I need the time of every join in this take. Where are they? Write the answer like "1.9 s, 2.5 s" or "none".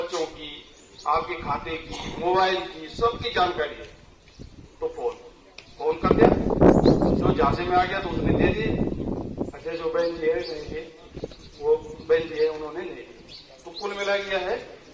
none